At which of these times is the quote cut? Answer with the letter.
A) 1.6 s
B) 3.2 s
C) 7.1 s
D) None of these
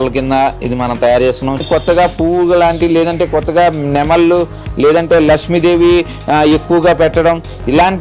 A